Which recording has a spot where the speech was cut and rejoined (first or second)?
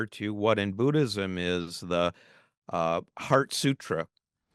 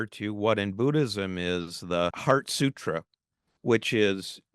second